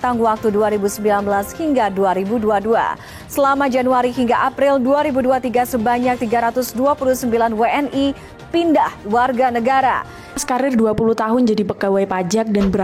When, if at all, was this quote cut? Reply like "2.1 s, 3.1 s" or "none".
10.4 s